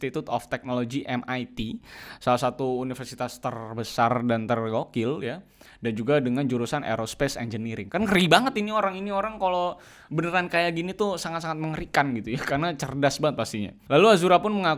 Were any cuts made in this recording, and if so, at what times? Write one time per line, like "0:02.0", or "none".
0:13.7